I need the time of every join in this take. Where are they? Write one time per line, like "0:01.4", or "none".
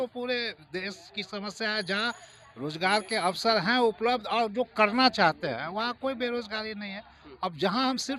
none